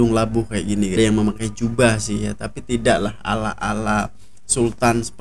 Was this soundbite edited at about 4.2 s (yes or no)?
no